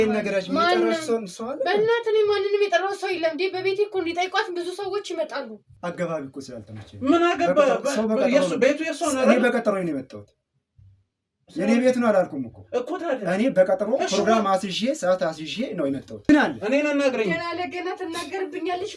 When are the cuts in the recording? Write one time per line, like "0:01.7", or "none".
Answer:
0:05.6
0:16.3